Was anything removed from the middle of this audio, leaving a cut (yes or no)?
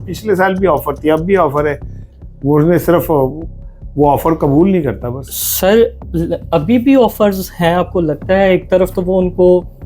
no